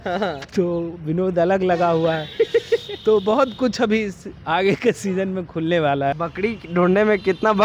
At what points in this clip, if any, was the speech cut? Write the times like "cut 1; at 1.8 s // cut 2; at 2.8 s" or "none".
cut 1; at 6.2 s